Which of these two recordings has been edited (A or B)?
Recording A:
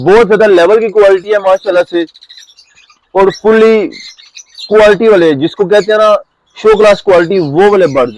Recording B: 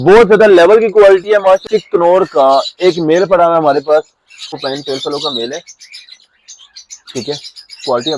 B